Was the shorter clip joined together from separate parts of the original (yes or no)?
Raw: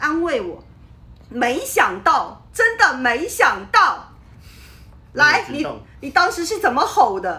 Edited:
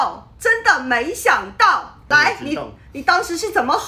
yes